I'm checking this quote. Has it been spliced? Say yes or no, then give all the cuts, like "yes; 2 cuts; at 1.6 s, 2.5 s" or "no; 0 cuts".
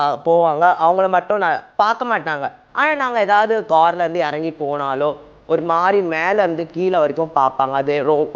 yes; 2 cuts; at 1.7 s, 3.6 s